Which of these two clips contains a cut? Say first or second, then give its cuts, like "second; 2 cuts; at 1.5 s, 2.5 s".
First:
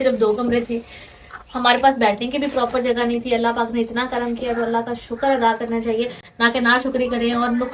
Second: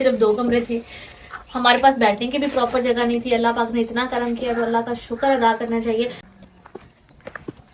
second; 1 cut; at 6.3 s